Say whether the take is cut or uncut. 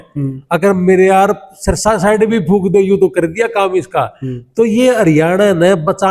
uncut